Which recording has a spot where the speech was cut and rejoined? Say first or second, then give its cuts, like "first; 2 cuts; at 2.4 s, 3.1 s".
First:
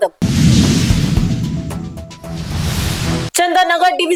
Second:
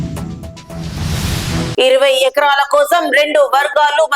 second; 1 cut; at 1.7 s